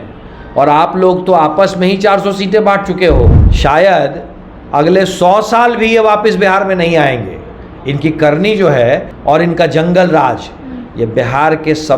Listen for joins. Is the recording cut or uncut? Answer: cut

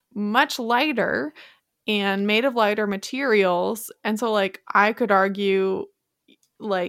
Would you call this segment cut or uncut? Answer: uncut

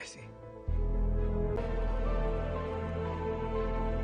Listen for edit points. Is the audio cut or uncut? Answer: cut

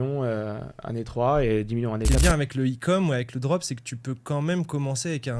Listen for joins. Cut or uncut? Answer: cut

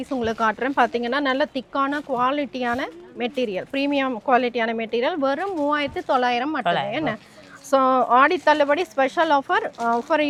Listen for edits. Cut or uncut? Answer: uncut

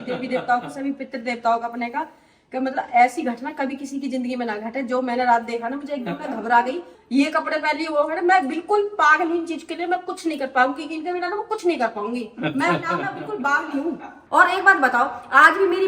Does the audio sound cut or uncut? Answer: cut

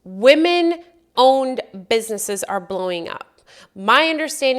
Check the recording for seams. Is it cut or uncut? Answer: uncut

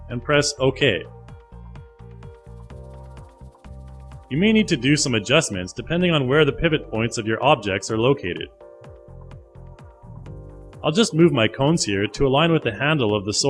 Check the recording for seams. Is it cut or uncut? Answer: uncut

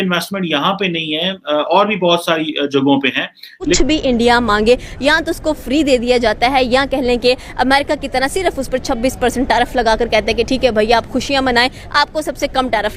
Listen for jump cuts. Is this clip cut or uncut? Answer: cut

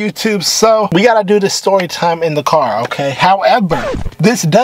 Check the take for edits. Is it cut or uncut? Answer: cut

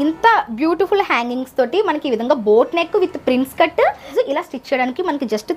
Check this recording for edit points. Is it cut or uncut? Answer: cut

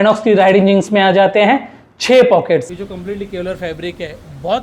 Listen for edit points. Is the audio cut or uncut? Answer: cut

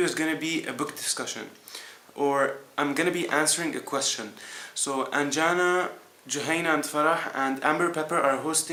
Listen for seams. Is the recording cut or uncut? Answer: uncut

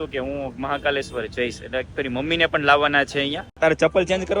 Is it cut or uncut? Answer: cut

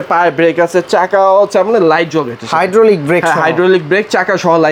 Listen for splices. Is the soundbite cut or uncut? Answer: uncut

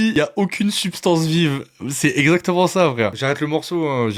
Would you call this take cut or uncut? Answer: uncut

